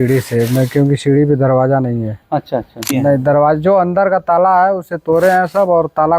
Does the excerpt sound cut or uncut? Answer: cut